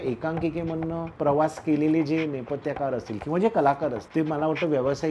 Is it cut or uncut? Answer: cut